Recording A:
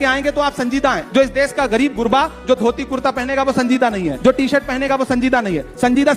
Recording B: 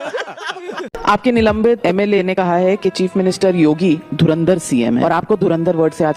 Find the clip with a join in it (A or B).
B